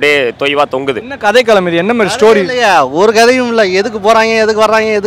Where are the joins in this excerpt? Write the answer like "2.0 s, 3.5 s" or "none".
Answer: 1.1 s